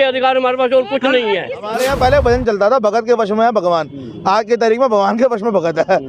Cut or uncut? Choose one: cut